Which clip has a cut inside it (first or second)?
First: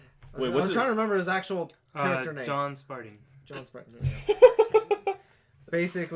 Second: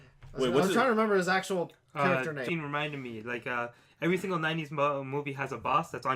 first